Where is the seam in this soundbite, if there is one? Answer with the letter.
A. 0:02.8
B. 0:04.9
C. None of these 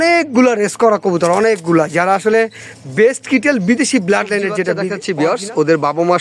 B